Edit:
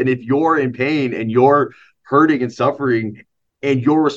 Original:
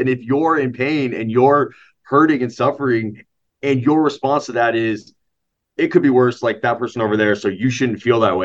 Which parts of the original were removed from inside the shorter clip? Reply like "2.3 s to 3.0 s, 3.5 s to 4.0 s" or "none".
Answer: none